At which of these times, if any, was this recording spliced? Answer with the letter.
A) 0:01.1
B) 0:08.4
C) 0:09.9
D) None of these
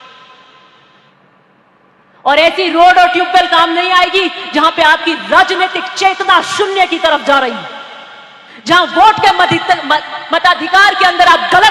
A